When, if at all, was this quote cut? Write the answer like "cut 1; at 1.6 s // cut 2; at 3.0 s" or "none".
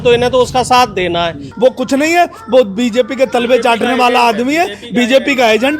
cut 1; at 1.4 s